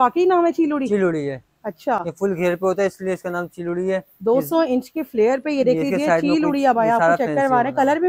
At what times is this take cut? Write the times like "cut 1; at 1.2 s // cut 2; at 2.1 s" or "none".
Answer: none